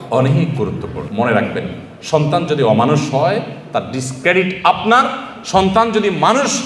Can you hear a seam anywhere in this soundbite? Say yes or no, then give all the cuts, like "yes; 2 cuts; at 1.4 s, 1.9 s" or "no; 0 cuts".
yes; 1 cut; at 1.0 s